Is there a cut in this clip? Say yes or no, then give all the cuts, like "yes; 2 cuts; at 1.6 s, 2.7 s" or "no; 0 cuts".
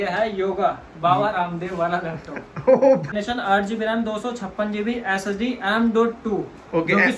yes; 1 cut; at 3.1 s